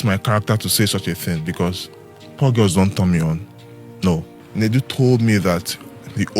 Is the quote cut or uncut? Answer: cut